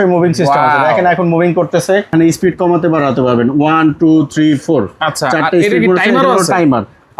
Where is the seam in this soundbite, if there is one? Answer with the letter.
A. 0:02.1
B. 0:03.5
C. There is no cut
A